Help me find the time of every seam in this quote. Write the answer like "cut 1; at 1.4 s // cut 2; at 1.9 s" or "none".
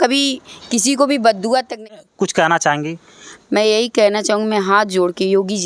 cut 1; at 2.0 s